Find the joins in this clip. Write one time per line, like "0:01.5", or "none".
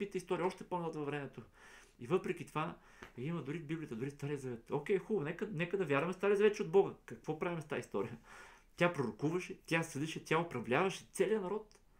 none